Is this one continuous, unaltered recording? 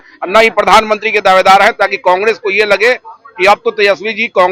yes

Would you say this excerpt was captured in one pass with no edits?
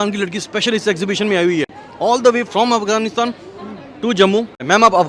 yes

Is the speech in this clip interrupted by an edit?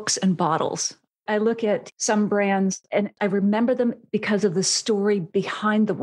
yes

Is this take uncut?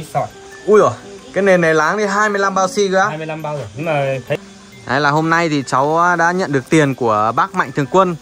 no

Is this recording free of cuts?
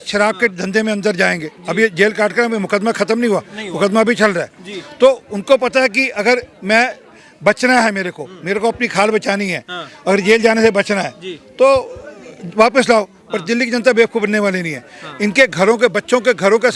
yes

